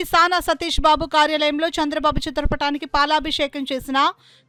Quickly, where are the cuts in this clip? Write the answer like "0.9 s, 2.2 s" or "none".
none